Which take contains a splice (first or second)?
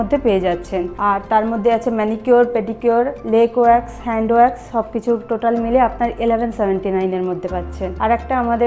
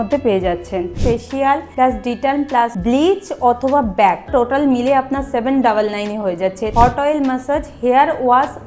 second